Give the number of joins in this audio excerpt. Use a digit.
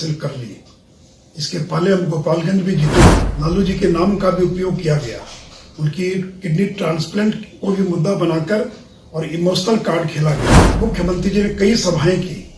2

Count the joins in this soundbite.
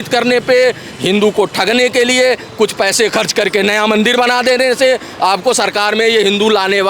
0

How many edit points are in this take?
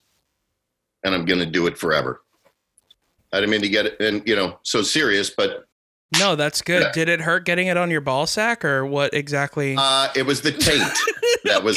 1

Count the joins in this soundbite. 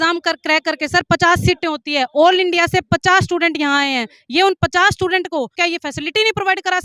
1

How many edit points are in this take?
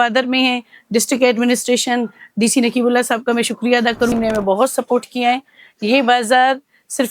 1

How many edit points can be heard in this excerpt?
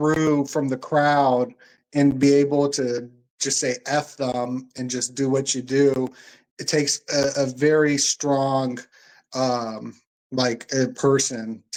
0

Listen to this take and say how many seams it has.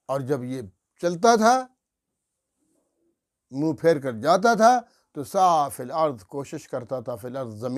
0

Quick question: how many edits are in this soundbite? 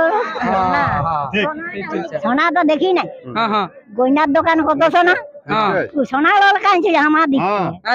1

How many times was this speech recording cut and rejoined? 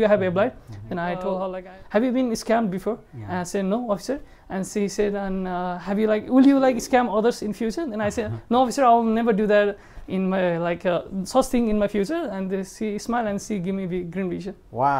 1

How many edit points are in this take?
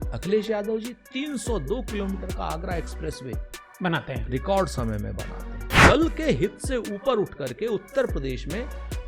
1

